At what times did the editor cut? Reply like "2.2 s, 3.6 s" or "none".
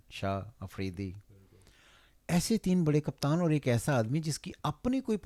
none